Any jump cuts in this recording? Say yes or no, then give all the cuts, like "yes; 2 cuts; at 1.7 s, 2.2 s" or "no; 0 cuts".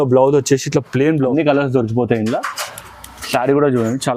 yes; 1 cut; at 1.3 s